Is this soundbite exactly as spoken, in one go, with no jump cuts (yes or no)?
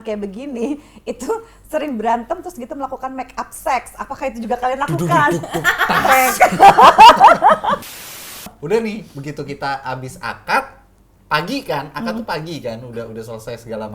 no